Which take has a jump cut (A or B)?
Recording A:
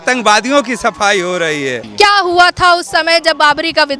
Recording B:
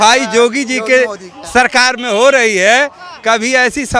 A